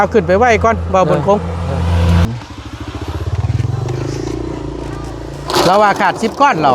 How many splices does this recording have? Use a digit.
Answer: 1